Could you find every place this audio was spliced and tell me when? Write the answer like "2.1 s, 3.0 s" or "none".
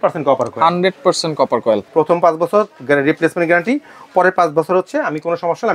1.9 s